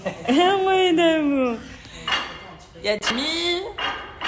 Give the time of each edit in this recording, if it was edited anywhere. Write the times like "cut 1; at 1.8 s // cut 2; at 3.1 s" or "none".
cut 1; at 3.1 s

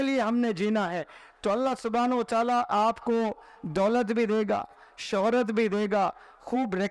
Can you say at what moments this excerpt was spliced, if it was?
none

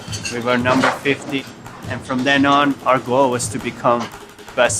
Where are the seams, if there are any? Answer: cut 1; at 1.4 s

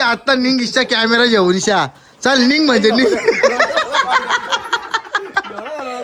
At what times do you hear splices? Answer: none

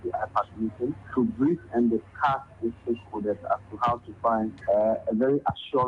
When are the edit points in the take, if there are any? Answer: cut 1; at 1.0 s // cut 2; at 4.6 s

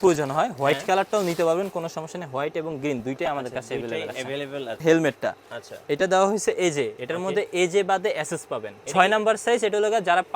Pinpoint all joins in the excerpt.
cut 1; at 4.8 s // cut 2; at 8.7 s

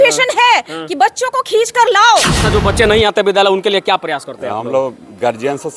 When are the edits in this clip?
cut 1; at 2.4 s

